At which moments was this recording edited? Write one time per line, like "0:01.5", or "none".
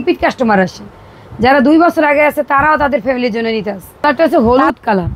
0:04.0

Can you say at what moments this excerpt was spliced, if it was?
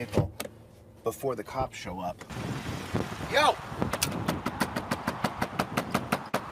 0:02.3

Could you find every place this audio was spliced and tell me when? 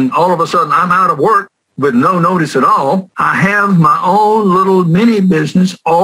0:03.2

